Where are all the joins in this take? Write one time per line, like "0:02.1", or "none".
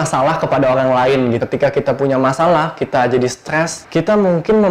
0:01.4